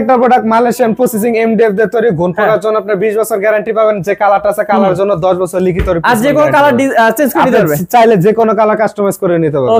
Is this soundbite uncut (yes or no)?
yes